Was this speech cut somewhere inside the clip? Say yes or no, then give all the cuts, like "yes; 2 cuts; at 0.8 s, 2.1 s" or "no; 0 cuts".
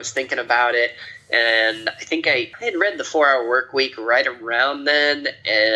yes; 1 cut; at 2.5 s